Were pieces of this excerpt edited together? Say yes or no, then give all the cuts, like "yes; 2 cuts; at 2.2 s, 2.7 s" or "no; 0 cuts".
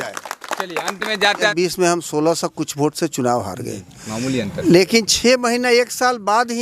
yes; 1 cut; at 1.4 s